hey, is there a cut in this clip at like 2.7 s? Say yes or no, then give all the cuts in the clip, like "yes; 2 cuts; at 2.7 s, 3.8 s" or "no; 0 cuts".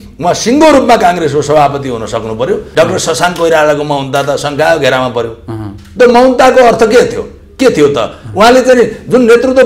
yes; 1 cut; at 2.7 s